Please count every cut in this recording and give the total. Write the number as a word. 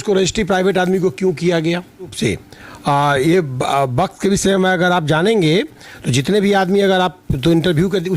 one